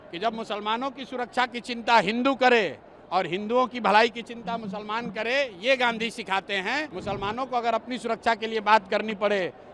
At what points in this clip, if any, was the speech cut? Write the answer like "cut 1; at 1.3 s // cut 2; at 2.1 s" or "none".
cut 1; at 6.9 s